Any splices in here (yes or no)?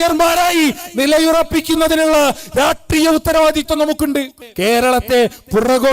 yes